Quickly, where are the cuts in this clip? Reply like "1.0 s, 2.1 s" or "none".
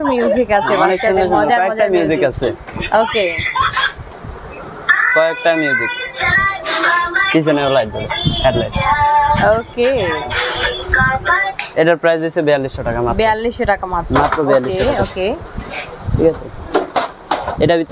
none